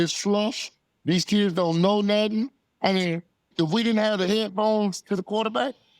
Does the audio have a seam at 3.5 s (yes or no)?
yes